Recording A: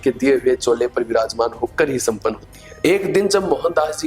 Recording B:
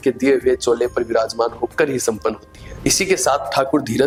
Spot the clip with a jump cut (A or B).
A